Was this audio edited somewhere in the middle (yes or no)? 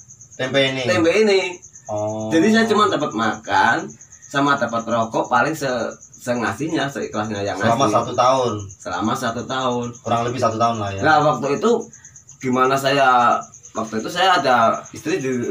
no